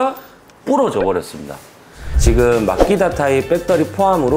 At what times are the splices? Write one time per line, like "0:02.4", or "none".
0:02.2